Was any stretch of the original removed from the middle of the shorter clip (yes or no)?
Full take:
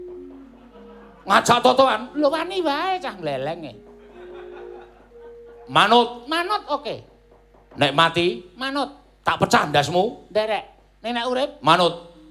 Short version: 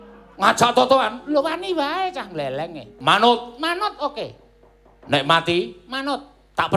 yes